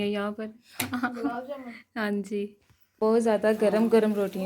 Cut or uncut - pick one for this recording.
cut